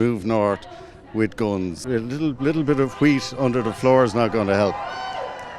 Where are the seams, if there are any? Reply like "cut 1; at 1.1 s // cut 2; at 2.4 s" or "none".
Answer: cut 1; at 1.8 s